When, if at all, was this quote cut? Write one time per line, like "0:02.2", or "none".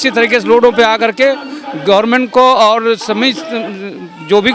none